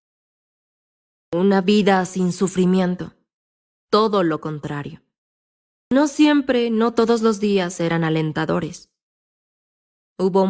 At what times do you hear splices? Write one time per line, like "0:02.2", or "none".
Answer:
0:05.9

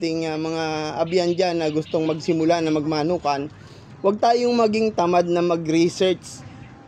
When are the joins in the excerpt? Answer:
none

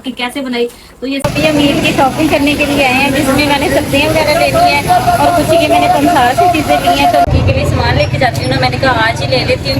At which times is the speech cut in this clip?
0:01.3
0:07.2

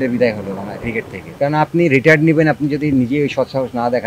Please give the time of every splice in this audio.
0:01.3

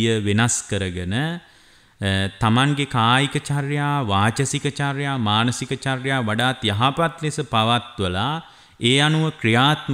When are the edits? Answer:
none

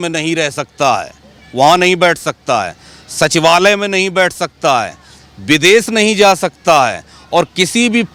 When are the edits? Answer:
none

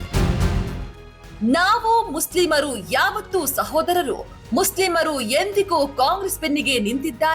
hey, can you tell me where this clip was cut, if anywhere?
0:01.0

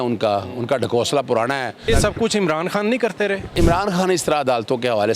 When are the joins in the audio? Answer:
0:01.9
0:03.5

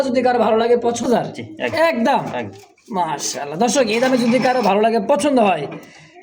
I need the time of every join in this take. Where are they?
0:01.2

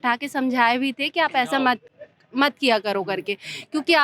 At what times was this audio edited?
none

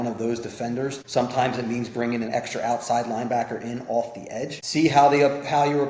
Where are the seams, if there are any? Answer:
0:01.0
0:04.6

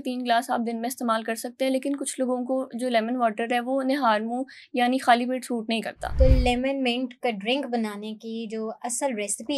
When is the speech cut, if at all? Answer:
0:06.1

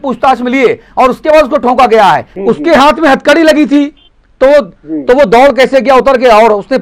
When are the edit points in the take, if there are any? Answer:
0:02.3

